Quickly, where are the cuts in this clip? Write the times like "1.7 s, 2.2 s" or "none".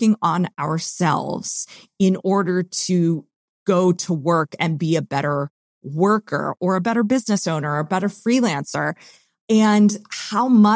9.3 s